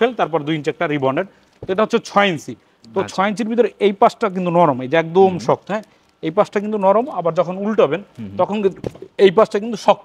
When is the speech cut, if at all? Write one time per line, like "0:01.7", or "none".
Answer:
none